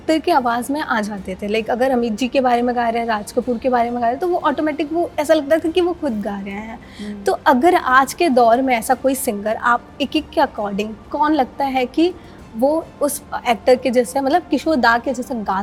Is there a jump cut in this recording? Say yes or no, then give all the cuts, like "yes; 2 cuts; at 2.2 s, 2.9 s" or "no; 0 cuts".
no; 0 cuts